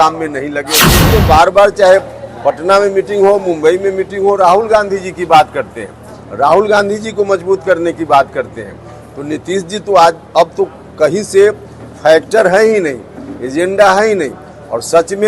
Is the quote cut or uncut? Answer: cut